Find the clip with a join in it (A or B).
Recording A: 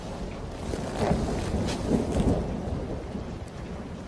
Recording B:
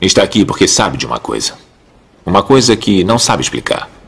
B